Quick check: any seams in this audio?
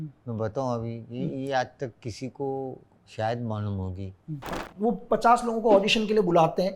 yes; 1 cut; at 4.6 s

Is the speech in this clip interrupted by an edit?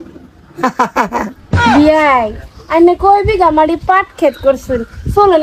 yes; 1 cut; at 1.5 s

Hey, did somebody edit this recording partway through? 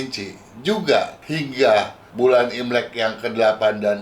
yes; 2 cuts; at 1.2 s, 2.0 s

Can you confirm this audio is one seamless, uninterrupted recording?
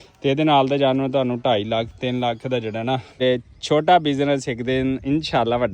no; 1 cut; at 3.2 s

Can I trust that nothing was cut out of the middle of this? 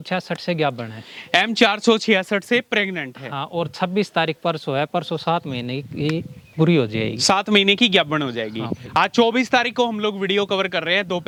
yes; 0 cuts

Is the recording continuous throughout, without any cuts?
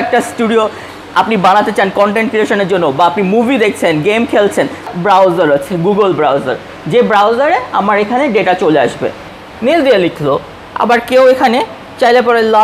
no; 2 cuts; at 4.9 s, 9.4 s

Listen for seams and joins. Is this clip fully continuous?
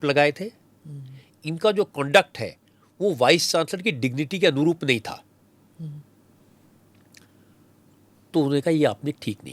yes; 0 cuts

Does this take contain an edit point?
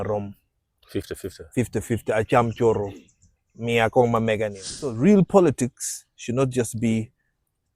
yes; 1 cut; at 5.0 s

